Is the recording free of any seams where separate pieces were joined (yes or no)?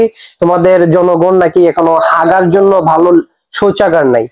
yes